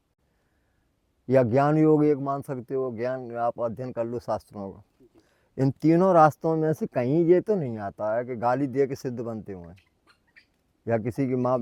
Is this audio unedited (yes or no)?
yes